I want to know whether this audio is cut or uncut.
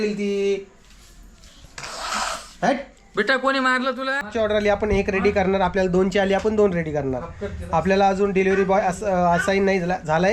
cut